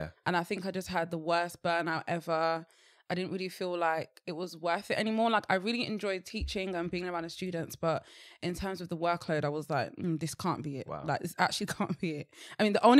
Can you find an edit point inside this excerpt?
no; 0 cuts

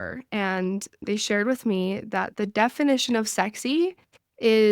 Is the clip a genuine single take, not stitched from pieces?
no; 1 cut; at 1.0 s

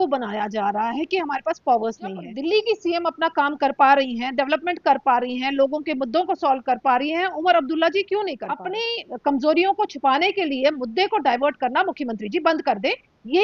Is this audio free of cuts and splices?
no; 2 cuts; at 2.3 s, 8.7 s

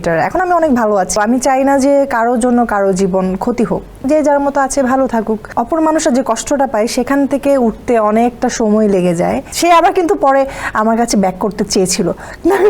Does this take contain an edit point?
yes; 4 cuts; at 1.2 s, 3.9 s, 5.4 s, 9.5 s

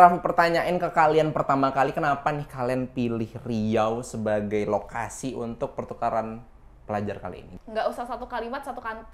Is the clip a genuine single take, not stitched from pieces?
no; 1 cut; at 7.5 s

